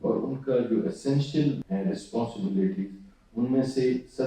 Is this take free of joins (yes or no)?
no